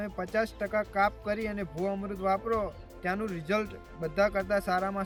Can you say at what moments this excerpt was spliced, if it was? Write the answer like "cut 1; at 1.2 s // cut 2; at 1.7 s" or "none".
none